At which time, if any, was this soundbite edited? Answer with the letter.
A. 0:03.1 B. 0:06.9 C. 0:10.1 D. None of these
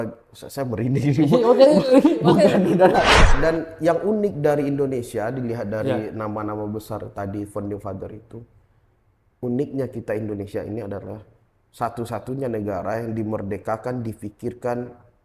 A